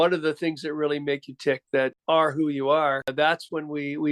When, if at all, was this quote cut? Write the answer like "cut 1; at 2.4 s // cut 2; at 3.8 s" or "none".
cut 1; at 2.0 s // cut 2; at 3.1 s